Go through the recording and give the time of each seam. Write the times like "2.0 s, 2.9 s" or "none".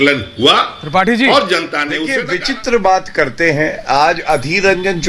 2.1 s